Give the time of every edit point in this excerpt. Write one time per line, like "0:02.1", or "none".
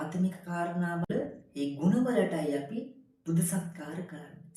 0:01.1